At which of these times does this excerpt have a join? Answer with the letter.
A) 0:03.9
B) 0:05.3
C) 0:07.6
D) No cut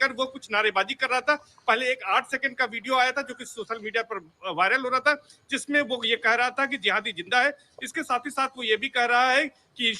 C